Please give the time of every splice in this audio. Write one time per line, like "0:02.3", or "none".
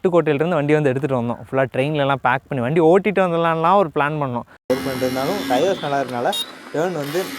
0:04.7